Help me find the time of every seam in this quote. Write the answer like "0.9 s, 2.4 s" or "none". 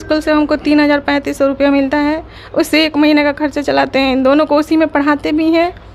none